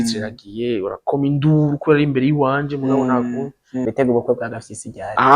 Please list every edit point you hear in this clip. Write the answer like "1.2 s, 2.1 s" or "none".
3.8 s